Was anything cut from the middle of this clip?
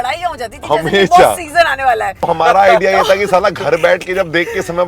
yes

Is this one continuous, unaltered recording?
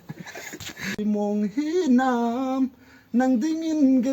no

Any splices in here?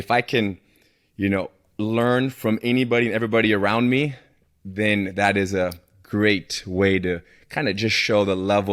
no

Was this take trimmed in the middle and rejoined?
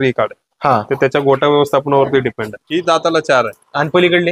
yes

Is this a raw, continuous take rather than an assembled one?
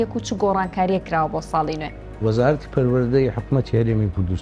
no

